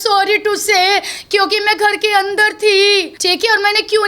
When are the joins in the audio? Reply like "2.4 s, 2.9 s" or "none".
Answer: 3.1 s